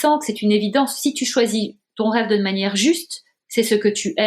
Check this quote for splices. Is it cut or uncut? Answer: uncut